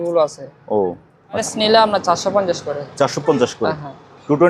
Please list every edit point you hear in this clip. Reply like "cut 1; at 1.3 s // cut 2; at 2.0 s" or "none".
cut 1; at 1.4 s